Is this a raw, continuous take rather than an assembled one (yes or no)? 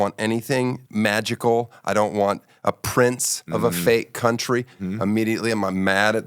no